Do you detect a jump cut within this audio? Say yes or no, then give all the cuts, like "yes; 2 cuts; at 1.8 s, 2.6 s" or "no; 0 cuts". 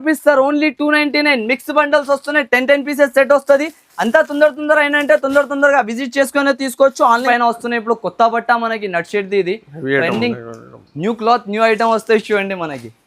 yes; 1 cut; at 7.2 s